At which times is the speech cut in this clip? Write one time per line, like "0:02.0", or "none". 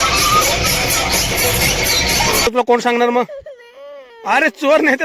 0:02.5